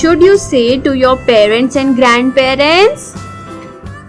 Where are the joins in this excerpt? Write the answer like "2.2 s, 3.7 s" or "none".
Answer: 3.0 s